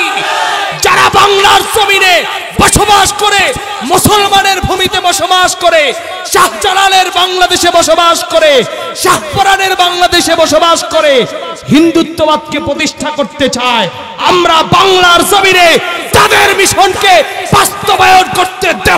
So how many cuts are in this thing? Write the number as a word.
zero